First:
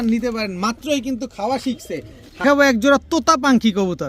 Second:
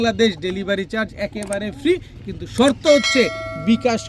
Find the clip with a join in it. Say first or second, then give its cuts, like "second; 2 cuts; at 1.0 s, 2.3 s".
first; 1 cut; at 2.4 s